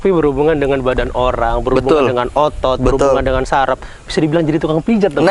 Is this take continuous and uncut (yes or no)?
yes